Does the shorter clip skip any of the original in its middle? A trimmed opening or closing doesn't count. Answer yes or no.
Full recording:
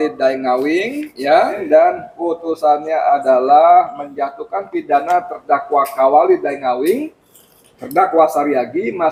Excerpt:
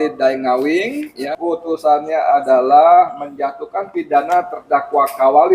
yes